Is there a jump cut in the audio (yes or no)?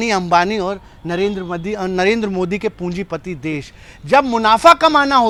no